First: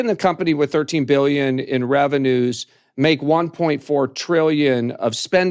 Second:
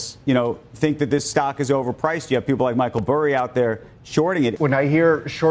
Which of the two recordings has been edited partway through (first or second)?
second